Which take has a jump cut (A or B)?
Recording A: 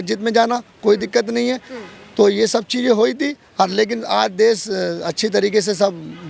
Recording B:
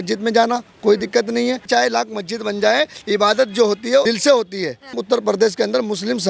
B